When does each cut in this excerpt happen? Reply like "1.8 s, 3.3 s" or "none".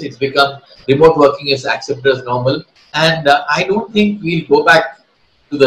2.8 s